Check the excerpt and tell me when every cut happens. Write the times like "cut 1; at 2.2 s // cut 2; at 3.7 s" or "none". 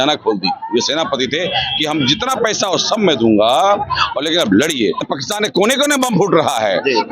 cut 1; at 5.0 s